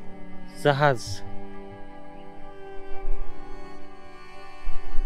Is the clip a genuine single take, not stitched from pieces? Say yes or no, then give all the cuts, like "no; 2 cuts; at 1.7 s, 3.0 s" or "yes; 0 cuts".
yes; 0 cuts